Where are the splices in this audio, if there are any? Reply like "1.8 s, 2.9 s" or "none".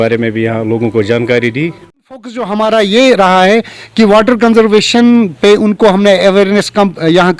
2.4 s